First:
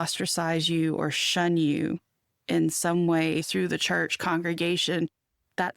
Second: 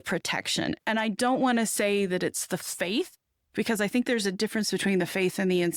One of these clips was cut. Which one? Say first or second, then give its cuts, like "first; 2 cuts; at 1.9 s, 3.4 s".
first; 1 cut; at 3.5 s